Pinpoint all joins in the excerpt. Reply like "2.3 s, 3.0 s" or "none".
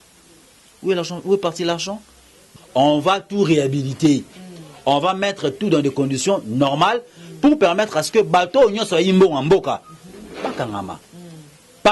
2.4 s